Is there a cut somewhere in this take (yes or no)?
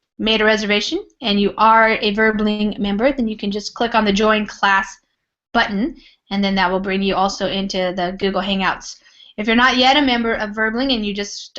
yes